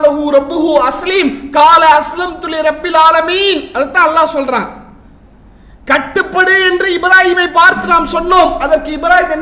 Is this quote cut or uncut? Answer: uncut